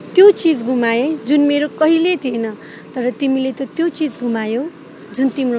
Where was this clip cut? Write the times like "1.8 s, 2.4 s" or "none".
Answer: none